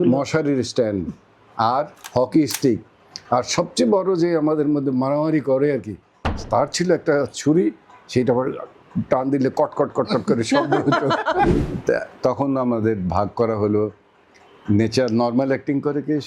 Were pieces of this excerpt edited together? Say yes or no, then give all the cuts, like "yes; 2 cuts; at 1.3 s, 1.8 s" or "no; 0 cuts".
yes; 1 cut; at 11.5 s